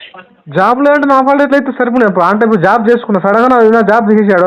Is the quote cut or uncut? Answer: uncut